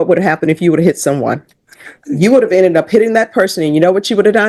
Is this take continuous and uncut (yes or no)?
yes